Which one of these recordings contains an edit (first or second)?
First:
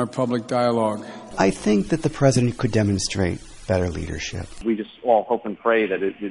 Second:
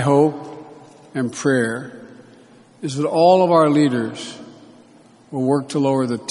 first